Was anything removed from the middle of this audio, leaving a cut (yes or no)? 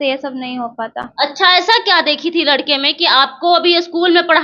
no